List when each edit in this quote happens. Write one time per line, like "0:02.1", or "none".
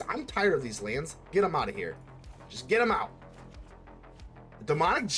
none

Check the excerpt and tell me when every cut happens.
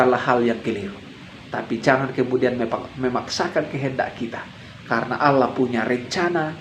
none

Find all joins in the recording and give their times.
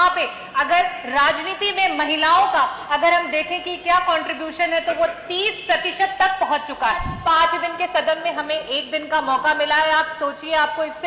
0:07.1

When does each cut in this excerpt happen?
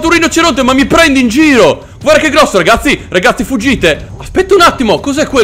0:01.9
0:04.1

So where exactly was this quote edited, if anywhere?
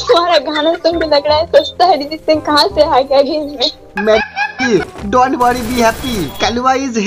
0:04.3

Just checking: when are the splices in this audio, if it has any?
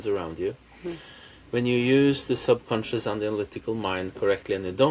none

